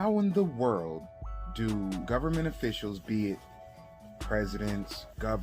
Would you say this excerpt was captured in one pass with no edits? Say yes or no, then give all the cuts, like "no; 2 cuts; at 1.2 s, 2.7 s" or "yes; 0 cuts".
no; 1 cut; at 2.0 s